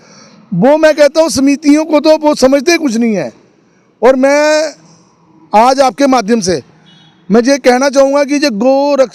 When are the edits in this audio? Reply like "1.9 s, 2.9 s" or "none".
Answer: none